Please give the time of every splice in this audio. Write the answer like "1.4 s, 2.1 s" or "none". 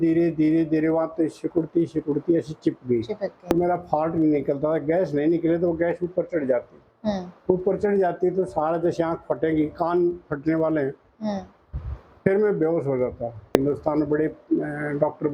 none